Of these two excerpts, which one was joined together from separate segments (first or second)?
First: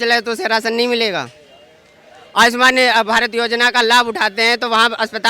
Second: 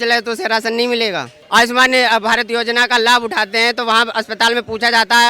second